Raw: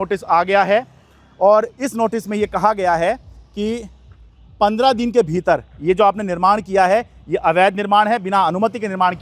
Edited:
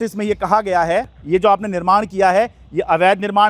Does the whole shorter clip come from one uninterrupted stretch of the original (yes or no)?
no